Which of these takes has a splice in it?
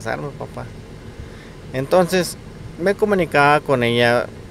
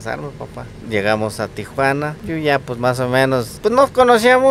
second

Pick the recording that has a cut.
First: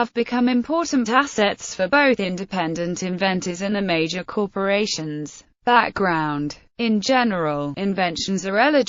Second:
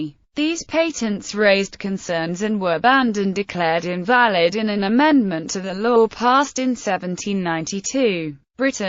first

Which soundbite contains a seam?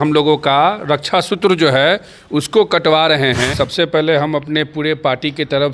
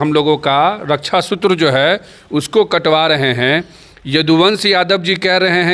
first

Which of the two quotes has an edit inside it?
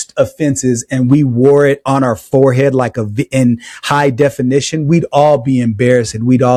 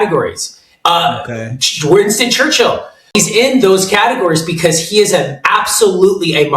second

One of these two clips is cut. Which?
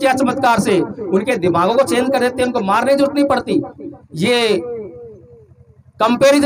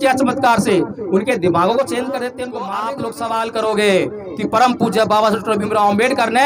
second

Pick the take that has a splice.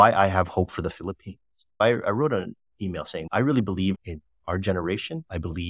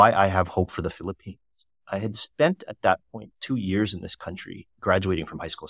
first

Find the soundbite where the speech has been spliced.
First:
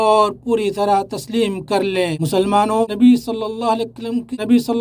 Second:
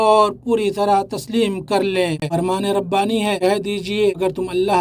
second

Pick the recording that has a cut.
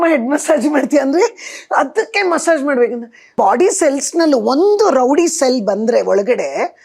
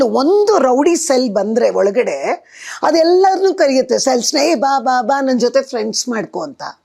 first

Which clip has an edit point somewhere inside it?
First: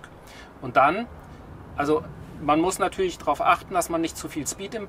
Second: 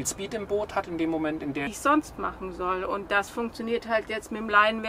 second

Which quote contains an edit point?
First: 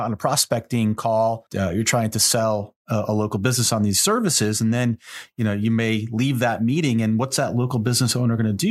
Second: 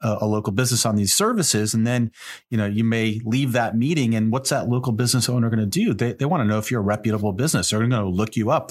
first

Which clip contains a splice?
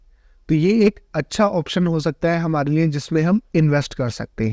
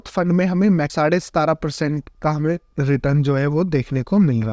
second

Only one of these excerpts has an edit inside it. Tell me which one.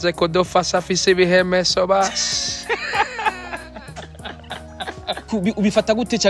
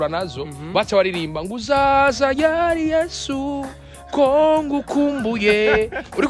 first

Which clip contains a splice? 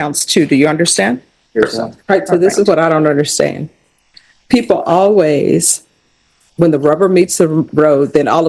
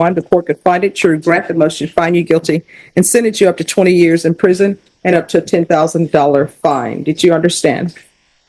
first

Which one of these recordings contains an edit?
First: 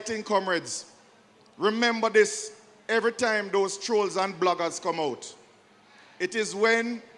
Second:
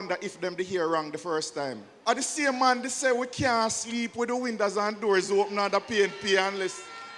second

